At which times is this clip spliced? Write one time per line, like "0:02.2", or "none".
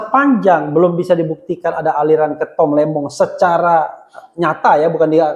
none